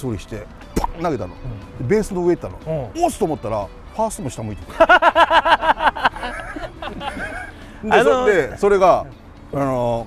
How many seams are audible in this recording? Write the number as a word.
zero